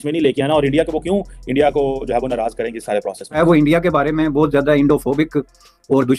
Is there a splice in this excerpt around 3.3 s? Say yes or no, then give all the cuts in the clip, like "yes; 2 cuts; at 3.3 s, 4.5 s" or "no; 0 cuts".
yes; 1 cut; at 3.3 s